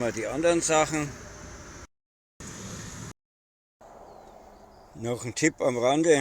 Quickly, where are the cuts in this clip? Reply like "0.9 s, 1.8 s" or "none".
3.1 s